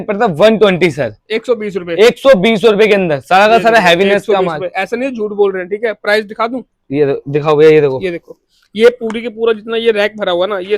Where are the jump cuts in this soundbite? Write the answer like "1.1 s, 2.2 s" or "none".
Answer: none